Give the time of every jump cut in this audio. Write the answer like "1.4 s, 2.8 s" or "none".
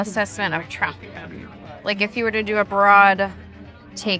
none